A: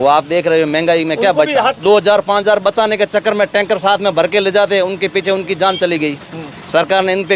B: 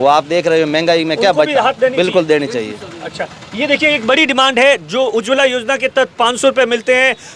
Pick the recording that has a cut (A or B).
A